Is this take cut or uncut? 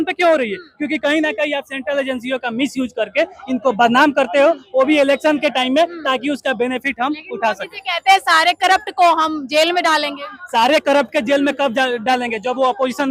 uncut